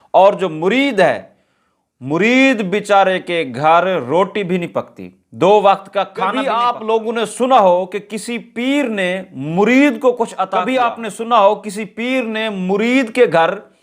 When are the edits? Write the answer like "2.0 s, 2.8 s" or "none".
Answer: 6.4 s, 10.4 s